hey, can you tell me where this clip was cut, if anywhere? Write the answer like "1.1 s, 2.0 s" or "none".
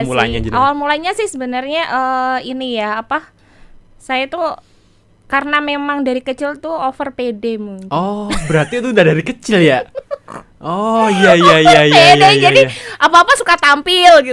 none